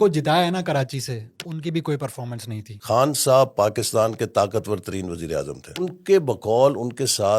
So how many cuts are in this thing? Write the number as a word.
two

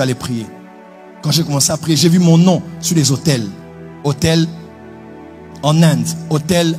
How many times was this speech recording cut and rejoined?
zero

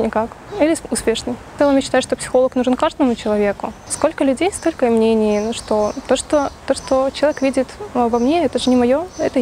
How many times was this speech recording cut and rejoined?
two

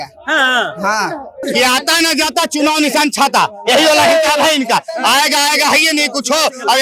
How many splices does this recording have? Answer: one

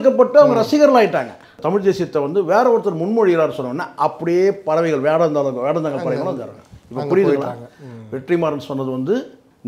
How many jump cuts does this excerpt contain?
one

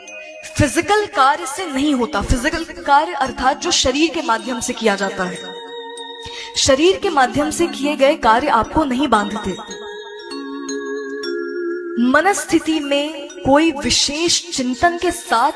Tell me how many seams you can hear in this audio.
zero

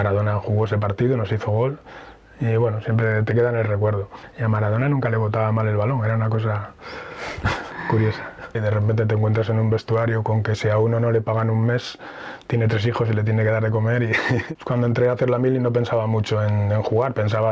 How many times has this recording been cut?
three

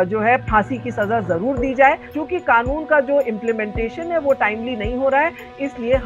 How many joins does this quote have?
one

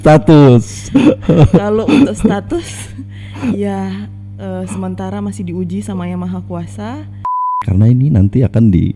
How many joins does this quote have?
one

